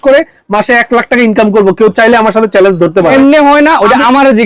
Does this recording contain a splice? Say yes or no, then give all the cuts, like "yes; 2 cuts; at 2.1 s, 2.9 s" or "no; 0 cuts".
yes; 1 cut; at 3.1 s